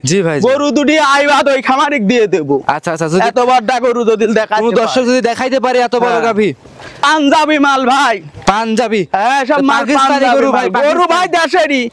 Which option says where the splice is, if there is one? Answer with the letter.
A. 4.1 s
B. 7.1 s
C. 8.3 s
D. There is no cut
B